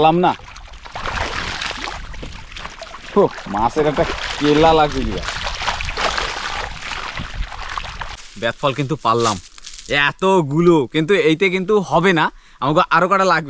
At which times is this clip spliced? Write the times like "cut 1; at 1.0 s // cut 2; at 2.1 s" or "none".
cut 1; at 8.2 s